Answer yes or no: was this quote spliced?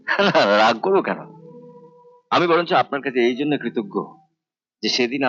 no